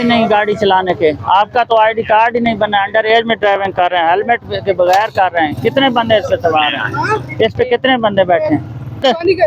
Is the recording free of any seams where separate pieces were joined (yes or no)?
yes